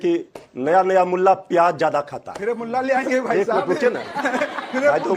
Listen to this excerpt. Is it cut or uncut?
uncut